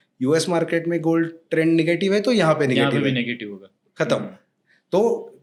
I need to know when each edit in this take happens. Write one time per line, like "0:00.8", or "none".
none